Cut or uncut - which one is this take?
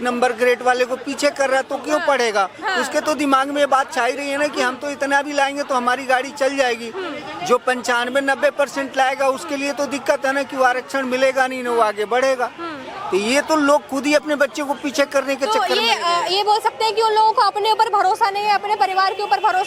uncut